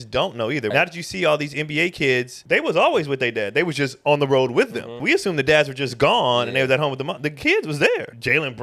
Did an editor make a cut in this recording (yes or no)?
yes